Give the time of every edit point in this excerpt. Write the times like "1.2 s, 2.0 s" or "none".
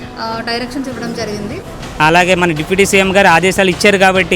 1.8 s